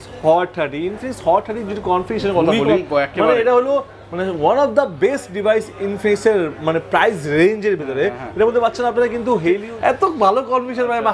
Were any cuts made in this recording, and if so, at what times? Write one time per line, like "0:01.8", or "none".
0:09.7